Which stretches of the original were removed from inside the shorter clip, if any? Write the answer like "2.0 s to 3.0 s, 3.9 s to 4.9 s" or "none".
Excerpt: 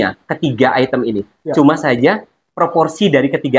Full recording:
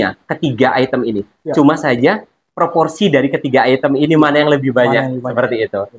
none